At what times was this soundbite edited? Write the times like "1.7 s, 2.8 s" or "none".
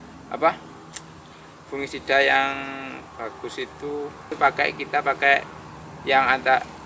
4.3 s